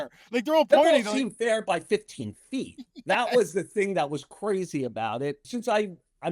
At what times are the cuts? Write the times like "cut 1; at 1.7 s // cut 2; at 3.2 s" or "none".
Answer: cut 1; at 5.4 s